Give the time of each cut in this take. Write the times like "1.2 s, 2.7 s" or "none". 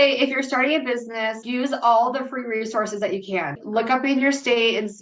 1.4 s, 3.6 s

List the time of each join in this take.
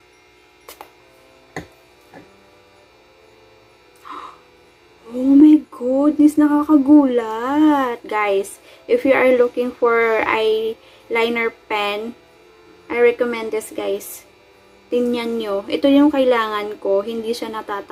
none

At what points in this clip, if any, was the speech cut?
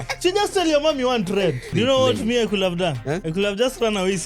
1.7 s, 3.2 s

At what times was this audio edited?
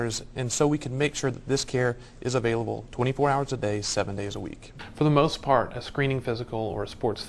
4.7 s

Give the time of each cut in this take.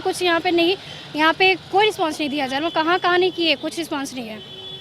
none

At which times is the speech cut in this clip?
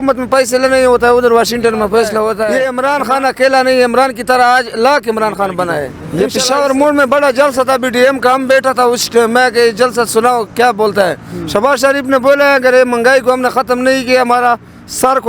2.5 s, 6.0 s

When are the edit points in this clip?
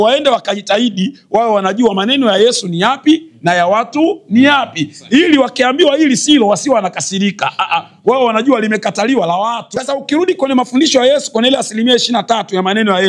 9.6 s

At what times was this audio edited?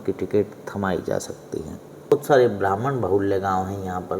2.1 s

